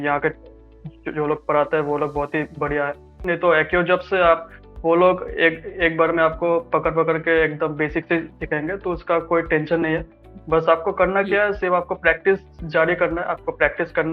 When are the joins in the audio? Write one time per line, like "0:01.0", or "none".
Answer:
0:03.2